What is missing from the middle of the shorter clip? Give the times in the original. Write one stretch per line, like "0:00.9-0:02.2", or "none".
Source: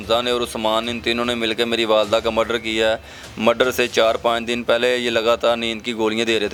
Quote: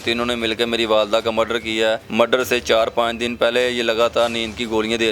0:03.0-0:03.3